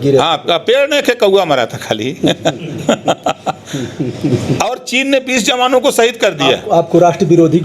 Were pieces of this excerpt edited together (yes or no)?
no